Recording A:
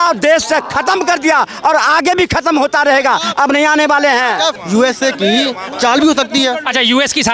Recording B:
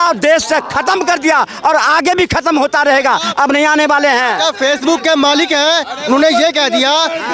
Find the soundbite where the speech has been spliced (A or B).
A